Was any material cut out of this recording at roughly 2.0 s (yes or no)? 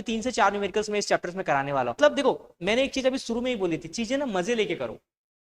yes